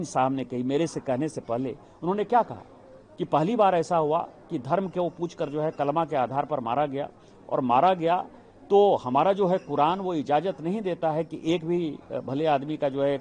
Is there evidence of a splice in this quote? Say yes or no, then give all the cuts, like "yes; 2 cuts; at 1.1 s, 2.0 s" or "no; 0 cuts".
no; 0 cuts